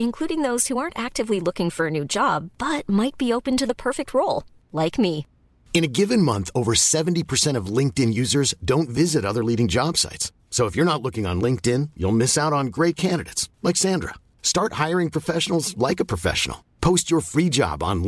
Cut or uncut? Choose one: uncut